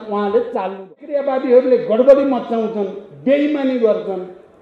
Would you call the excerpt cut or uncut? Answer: cut